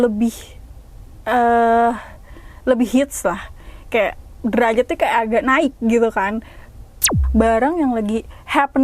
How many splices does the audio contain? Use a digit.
1